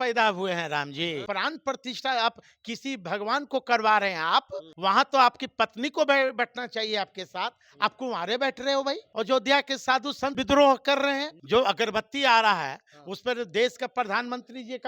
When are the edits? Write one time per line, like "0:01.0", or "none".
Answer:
0:01.2
0:04.7
0:09.1
0:10.4
0:11.3